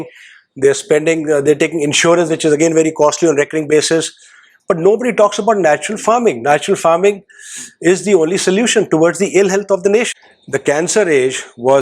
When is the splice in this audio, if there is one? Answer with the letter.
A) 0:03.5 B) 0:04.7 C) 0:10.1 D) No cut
C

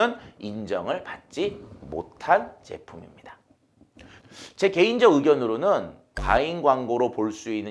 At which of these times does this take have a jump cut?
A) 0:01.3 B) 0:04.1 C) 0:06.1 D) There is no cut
B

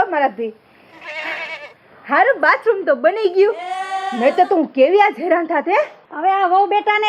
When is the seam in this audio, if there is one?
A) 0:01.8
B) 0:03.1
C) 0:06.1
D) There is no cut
C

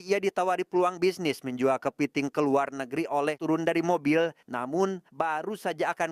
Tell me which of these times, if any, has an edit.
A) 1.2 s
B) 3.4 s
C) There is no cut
B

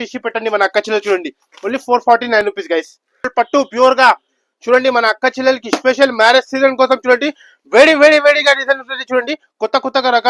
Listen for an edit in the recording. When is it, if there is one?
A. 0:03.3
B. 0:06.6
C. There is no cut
A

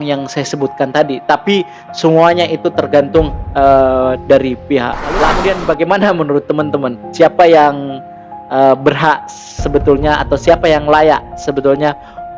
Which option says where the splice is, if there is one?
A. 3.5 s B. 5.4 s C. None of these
B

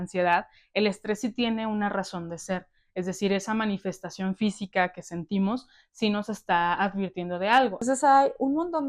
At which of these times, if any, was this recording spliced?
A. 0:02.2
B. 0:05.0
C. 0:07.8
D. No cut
C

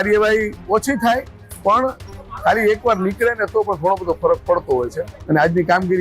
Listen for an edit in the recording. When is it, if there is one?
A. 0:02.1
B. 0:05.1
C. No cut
B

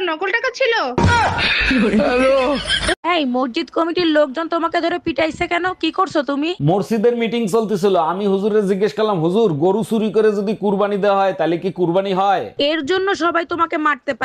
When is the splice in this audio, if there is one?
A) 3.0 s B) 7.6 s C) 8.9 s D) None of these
A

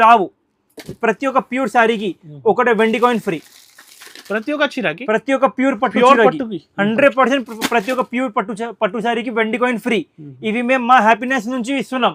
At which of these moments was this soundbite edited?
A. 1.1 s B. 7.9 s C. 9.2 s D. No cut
D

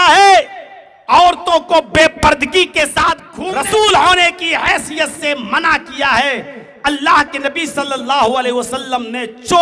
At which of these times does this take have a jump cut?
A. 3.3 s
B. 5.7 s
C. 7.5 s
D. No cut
A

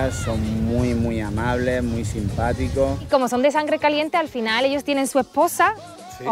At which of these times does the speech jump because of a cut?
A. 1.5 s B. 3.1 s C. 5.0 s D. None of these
B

